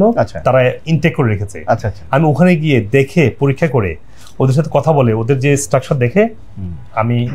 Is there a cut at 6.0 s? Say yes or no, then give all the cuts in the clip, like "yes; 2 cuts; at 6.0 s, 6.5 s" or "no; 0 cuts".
no; 0 cuts